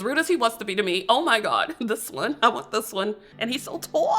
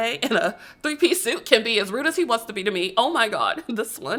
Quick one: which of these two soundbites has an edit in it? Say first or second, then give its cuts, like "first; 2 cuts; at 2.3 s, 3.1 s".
first; 1 cut; at 3.3 s